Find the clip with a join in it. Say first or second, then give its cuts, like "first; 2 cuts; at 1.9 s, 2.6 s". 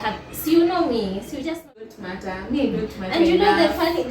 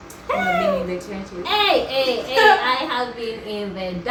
first; 1 cut; at 1.8 s